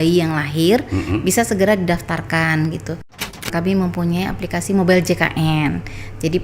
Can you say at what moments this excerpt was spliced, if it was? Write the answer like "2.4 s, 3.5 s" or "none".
3.2 s